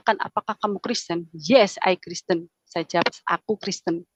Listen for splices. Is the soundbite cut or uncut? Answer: uncut